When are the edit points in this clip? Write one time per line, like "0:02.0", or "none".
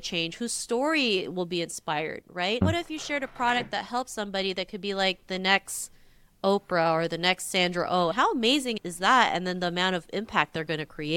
0:02.6